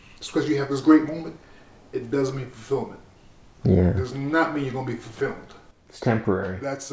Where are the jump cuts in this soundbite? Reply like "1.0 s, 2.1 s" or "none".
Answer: none